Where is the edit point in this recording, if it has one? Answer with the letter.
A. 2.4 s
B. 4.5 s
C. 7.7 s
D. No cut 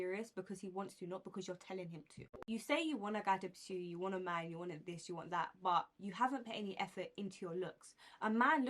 A